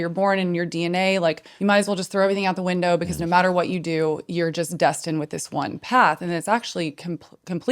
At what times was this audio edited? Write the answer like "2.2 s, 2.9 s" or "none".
1.5 s